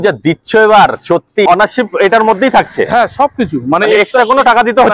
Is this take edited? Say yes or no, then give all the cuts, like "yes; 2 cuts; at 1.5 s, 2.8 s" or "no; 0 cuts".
yes; 1 cut; at 1.5 s